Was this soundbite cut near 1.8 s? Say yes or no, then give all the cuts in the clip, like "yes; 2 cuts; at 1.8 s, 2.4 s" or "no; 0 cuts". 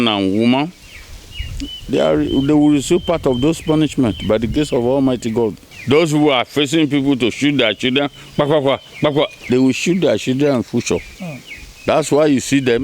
no; 1 cut; at 5.7 s